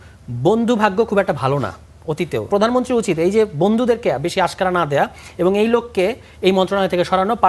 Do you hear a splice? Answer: yes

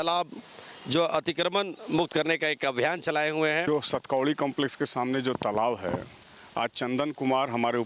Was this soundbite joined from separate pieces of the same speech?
yes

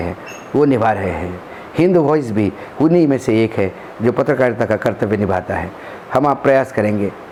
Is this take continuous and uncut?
yes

